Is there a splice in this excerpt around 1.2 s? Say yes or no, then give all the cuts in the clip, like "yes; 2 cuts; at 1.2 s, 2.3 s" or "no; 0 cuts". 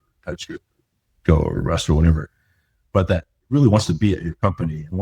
no; 1 cut; at 3.3 s